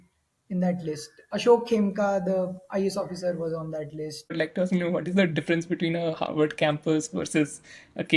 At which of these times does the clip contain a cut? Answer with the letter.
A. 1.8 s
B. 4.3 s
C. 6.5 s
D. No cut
B